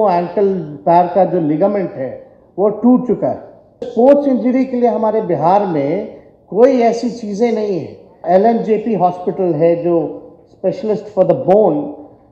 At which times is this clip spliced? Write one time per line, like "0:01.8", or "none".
0:03.9
0:08.2